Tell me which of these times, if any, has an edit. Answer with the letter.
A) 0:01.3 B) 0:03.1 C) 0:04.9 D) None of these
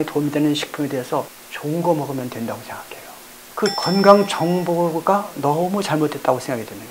A